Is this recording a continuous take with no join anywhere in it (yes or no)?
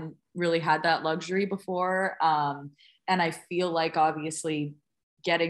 yes